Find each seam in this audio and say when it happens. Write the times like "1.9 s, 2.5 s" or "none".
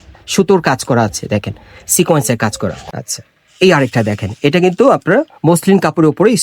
2.8 s